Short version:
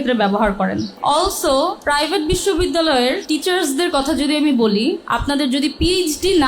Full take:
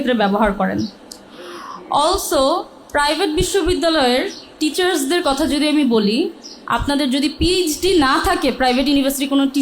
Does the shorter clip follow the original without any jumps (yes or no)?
no